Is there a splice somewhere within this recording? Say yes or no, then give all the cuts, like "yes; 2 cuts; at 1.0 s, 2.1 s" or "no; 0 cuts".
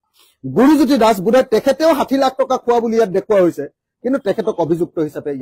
no; 0 cuts